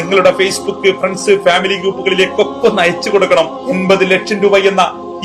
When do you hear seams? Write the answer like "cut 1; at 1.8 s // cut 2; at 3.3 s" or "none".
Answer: cut 1; at 3.6 s